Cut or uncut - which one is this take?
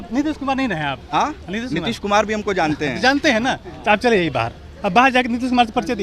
uncut